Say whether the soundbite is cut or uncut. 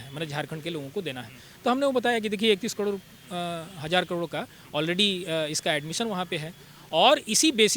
uncut